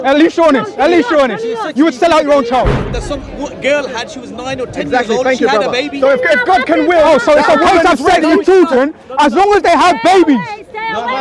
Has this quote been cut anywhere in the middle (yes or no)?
yes